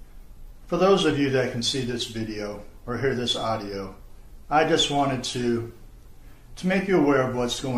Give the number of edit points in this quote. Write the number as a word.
zero